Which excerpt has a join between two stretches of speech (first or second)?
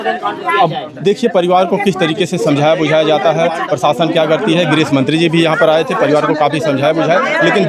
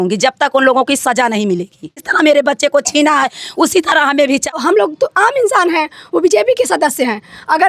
second